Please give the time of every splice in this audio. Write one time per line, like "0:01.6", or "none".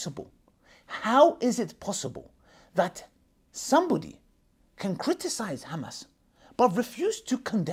none